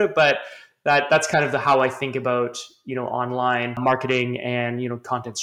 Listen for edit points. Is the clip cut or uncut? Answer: cut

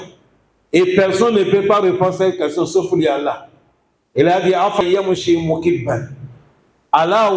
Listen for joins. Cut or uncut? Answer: cut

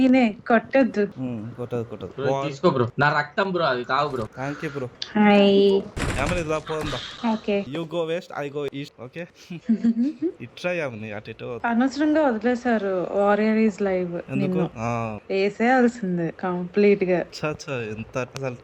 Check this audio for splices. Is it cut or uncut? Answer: cut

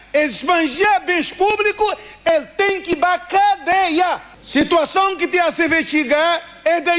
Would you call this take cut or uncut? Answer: cut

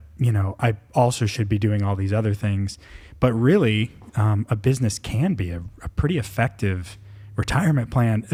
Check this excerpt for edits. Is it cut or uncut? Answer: uncut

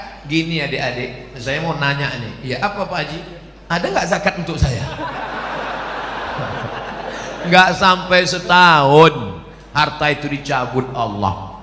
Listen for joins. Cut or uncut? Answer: uncut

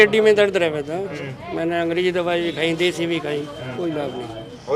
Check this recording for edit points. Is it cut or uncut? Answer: uncut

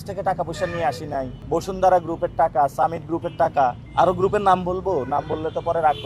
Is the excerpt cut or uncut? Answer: cut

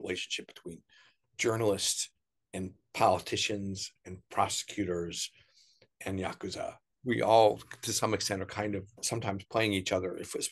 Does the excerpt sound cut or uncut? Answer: cut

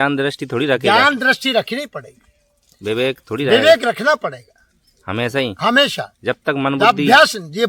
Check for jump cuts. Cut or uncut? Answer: uncut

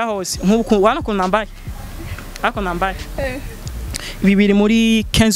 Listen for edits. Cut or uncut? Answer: uncut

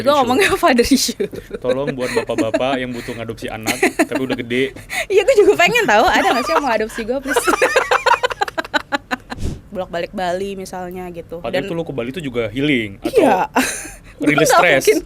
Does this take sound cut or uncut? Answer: cut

